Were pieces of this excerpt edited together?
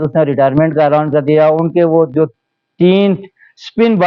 no; 0 cuts

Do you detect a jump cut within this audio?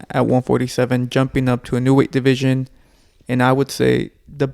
no; 0 cuts

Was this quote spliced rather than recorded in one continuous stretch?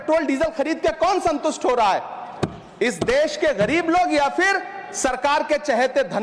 no; 0 cuts

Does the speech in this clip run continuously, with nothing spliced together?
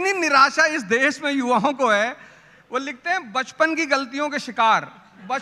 yes; 0 cuts

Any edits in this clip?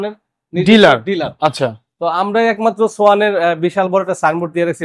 no; 0 cuts

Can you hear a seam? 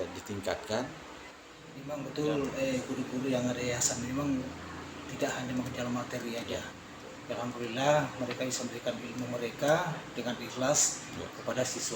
yes; 1 cut; at 1.8 s

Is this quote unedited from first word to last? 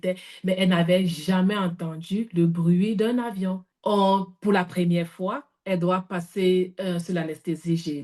no; 1 cut; at 3.7 s

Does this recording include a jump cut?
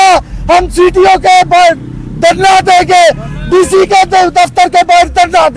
no; 0 cuts

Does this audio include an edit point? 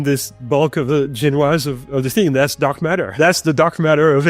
yes; 1 cut; at 3.1 s

